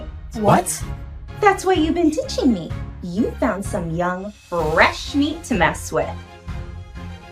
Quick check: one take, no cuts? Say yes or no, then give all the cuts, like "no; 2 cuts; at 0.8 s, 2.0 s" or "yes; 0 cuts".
no; 1 cut; at 6.1 s